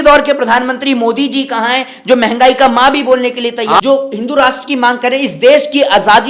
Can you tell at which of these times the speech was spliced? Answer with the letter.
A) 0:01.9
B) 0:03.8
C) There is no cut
B